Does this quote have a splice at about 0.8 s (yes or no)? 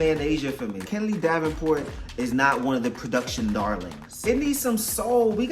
yes